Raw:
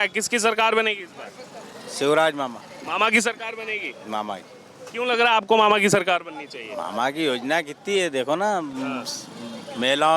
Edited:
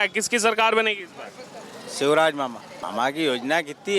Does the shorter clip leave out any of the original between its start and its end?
yes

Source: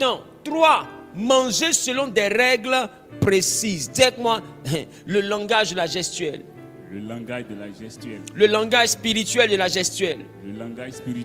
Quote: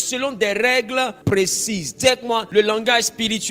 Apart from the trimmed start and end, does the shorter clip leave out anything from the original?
yes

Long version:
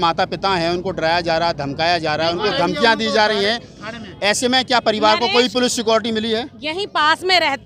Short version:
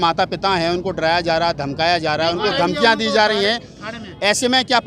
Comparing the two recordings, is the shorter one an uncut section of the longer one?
yes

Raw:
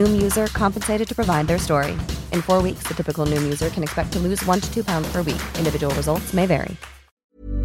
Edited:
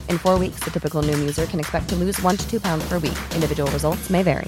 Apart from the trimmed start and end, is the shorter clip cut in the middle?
no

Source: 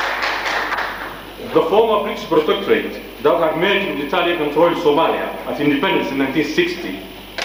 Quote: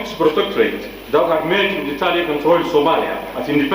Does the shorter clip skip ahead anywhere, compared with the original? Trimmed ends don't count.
no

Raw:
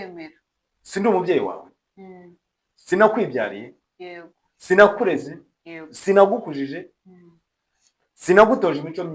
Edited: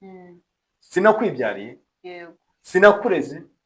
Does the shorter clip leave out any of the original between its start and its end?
no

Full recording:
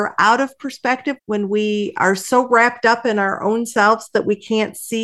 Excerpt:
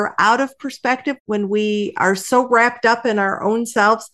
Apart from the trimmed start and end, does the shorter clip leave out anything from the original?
no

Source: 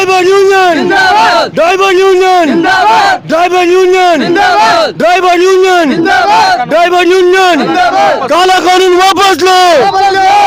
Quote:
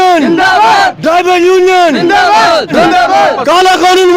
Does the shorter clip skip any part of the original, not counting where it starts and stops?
yes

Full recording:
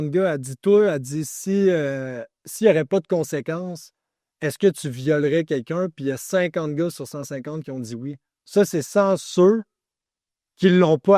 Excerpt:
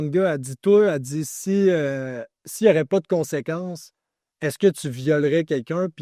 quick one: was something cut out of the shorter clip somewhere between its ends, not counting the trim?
no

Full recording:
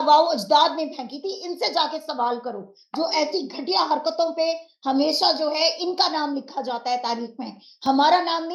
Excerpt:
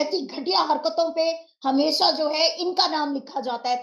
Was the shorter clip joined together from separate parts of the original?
no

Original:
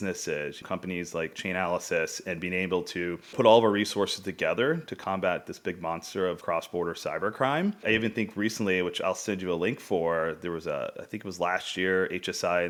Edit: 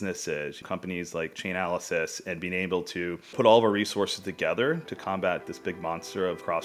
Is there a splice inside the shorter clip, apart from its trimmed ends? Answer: no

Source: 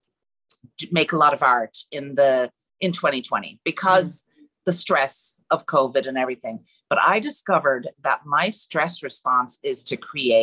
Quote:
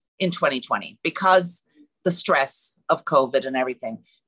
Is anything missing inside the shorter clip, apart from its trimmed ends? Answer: no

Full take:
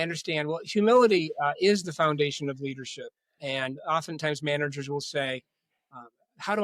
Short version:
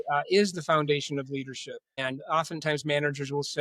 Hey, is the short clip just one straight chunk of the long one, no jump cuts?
no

